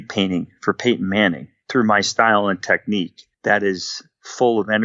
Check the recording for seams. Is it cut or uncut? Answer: cut